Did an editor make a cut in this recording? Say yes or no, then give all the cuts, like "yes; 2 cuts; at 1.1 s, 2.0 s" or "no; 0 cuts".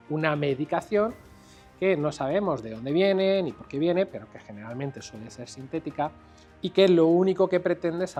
no; 0 cuts